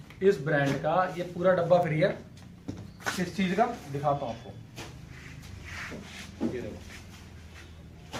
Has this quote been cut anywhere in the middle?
no; 0 cuts

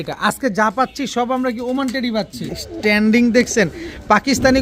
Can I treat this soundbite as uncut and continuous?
no; 1 cut; at 2.6 s

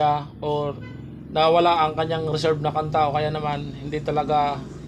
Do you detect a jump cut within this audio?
no; 0 cuts

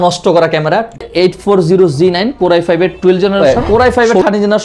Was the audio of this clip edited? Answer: yes; 2 cuts; at 1.0 s, 3.4 s

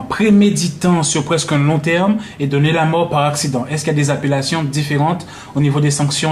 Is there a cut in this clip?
no; 0 cuts

